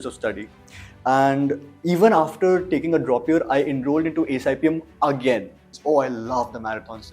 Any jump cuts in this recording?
yes; 1 cut; at 5.7 s

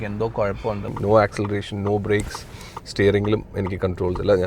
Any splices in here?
yes; 1 cut; at 0.9 s

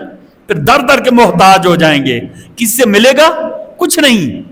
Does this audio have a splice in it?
no; 0 cuts

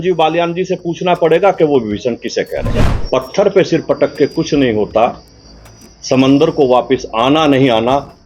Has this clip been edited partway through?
yes; 1 cut; at 2.7 s

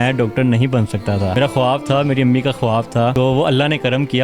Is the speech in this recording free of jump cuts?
no; 2 cuts; at 1.4 s, 3.1 s

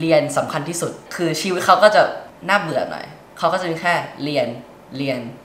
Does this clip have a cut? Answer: yes; 2 cuts; at 1.0 s, 2.3 s

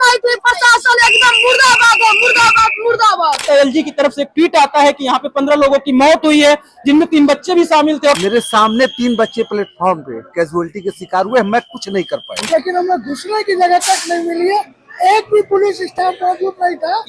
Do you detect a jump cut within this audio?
yes; 3 cuts; at 3.4 s, 8.2 s, 12.5 s

